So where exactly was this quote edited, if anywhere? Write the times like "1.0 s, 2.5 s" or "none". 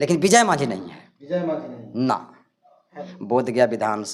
3.0 s